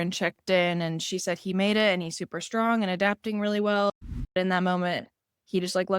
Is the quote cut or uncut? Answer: cut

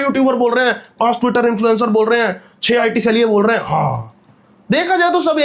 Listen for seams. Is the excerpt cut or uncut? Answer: uncut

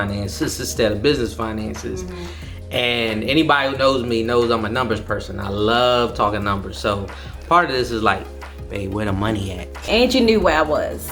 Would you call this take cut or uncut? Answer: cut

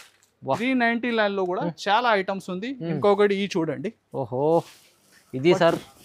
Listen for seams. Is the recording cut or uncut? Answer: uncut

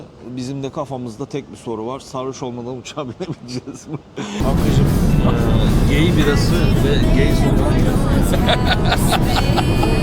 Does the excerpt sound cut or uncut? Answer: cut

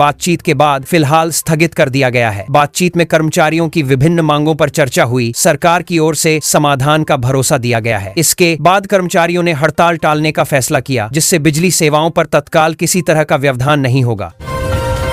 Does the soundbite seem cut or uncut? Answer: uncut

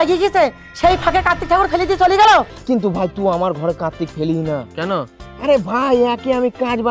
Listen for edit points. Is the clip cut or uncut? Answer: cut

